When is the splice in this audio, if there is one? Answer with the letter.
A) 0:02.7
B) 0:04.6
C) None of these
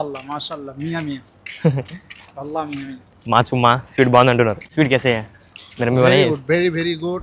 B